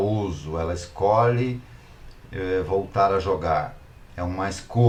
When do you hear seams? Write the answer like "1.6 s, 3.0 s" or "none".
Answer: none